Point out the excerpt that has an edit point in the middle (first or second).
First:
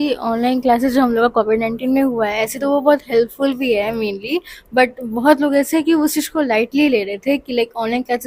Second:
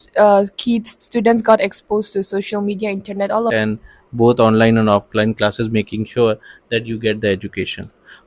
second